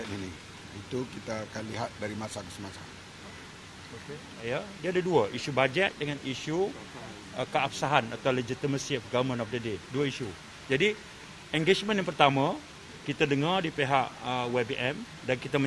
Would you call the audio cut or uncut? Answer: cut